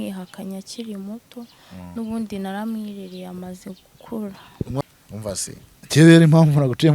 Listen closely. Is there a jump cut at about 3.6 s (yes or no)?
no